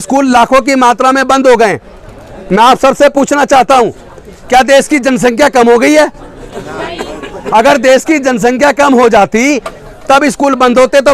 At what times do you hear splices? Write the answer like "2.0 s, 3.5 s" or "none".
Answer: none